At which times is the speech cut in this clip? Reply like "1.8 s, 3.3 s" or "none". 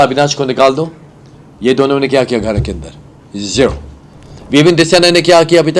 4.3 s